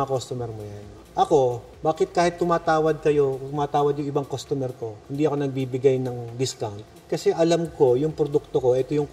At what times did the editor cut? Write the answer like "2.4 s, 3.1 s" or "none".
none